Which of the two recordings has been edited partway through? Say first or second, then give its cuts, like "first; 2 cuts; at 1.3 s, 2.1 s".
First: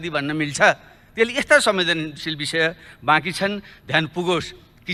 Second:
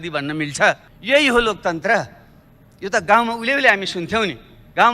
second; 1 cut; at 0.9 s